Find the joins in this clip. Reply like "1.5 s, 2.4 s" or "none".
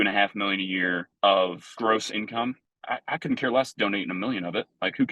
1.1 s, 1.7 s, 2.7 s